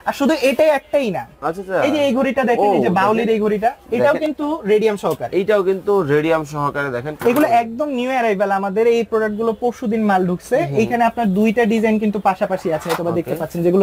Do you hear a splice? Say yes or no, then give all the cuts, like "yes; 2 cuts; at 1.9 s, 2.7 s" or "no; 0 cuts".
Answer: yes; 1 cut; at 7.1 s